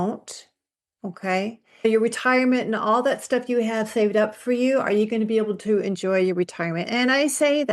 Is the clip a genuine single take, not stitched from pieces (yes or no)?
no